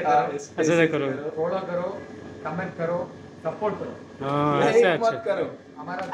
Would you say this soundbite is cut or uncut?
uncut